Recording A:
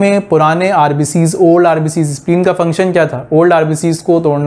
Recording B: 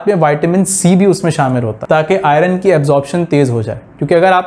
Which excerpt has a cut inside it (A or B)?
B